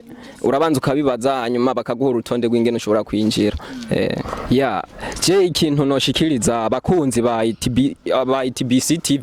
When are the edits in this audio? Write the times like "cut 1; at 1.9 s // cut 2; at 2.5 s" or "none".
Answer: cut 1; at 4.3 s

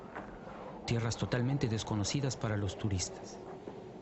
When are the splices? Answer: none

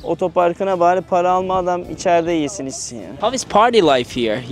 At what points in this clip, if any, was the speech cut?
cut 1; at 3.1 s

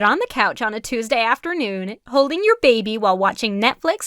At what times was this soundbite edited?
cut 1; at 2.0 s

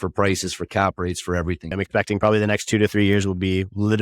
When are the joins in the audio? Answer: cut 1; at 1.7 s

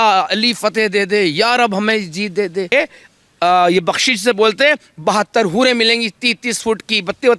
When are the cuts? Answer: cut 1; at 2.7 s

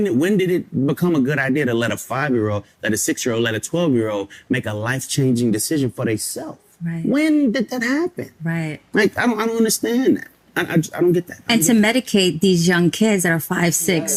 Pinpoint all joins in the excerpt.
none

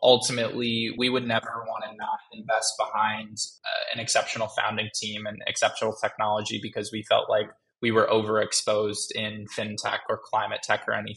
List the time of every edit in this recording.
cut 1; at 0.9 s

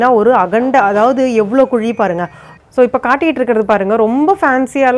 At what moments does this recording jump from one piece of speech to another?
cut 1; at 2.5 s

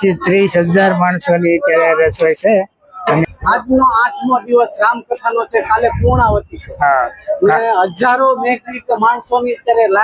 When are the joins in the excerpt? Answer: cut 1; at 3.2 s

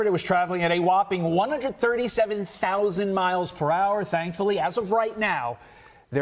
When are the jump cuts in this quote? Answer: cut 1; at 3.5 s

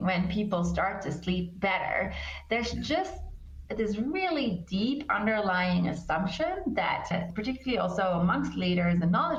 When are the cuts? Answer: none

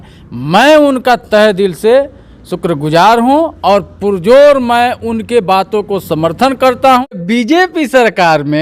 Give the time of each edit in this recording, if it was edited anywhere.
cut 1; at 7.1 s

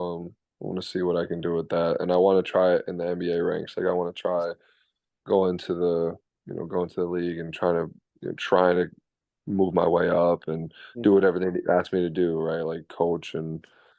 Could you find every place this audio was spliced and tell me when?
none

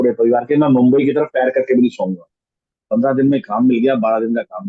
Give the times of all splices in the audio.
cut 1; at 2.6 s

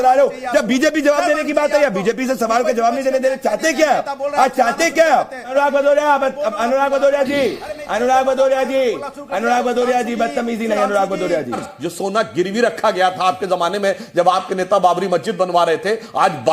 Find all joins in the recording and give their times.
cut 1; at 5.5 s // cut 2; at 11.6 s

